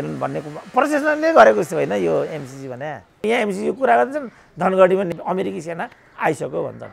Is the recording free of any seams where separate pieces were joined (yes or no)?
no